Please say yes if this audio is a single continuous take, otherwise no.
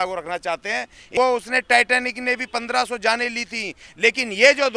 no